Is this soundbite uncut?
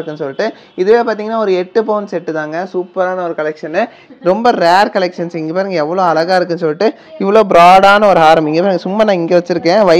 no; 1 cut; at 4.1 s

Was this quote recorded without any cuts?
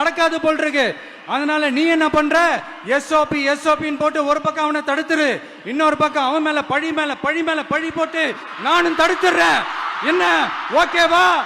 yes; 0 cuts

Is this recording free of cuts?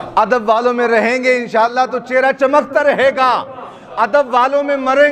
yes; 0 cuts

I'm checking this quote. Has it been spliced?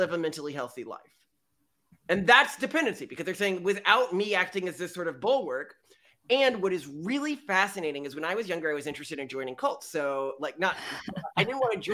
no; 0 cuts

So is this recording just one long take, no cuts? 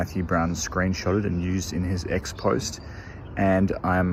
yes; 0 cuts

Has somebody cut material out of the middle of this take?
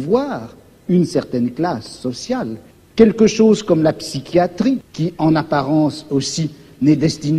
yes; 2 cuts; at 2.7 s, 4.9 s

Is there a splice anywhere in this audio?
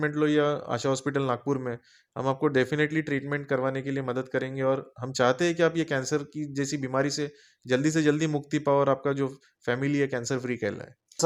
no; 0 cuts

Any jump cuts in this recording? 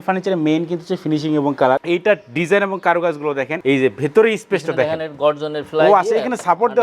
yes; 2 cuts; at 1.8 s, 3.6 s

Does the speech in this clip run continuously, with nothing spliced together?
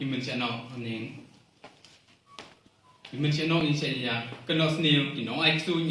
yes; 0 cuts

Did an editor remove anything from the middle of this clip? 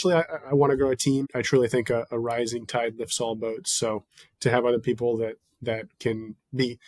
yes; 1 cut; at 1.3 s

